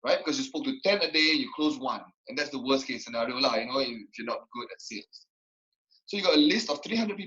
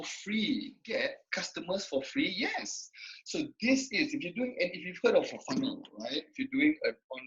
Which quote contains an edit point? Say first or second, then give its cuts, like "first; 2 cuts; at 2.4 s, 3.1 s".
second; 1 cut; at 1.2 s